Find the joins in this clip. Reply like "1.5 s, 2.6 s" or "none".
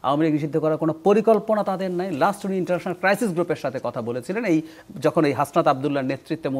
none